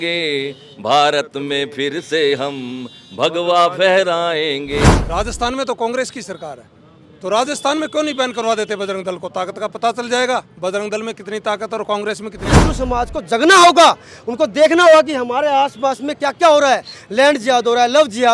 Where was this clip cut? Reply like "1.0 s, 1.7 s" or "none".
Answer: 4.9 s, 12.4 s